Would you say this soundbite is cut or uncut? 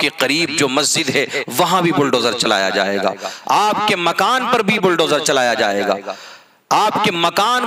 uncut